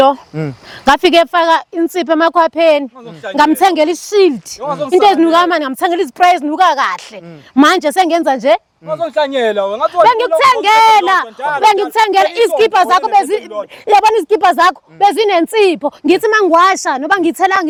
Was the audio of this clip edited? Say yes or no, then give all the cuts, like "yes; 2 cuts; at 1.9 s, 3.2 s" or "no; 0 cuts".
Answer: no; 0 cuts